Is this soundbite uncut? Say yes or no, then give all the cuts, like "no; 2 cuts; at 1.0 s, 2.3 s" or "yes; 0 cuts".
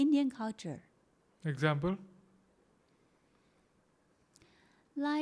yes; 0 cuts